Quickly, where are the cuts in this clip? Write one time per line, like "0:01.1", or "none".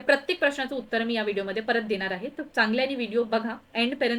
none